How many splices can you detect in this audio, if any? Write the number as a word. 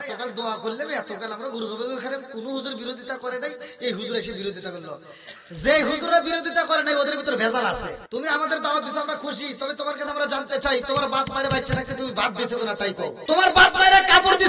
two